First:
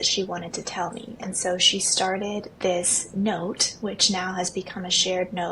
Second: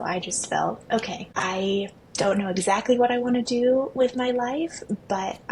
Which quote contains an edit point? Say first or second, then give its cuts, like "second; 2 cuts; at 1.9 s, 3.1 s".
second; 1 cut; at 1.2 s